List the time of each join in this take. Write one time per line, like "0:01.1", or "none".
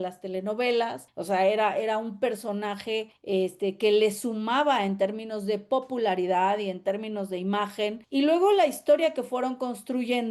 0:01.1
0:03.1
0:08.0